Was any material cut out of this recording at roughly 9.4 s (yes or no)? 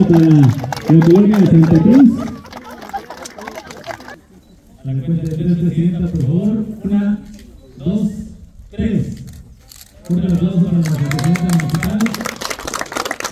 no